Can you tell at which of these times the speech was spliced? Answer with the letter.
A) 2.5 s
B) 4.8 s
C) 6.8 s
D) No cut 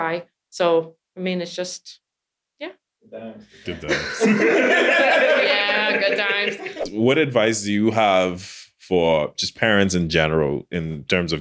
C